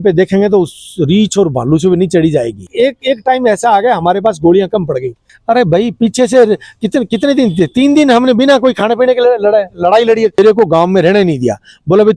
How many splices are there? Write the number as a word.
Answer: three